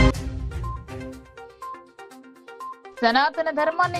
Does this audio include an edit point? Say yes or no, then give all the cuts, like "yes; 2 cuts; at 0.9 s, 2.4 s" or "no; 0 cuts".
yes; 1 cut; at 1.8 s